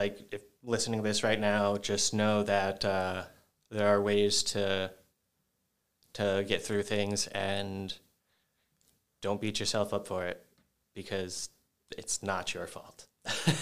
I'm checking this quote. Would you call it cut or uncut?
uncut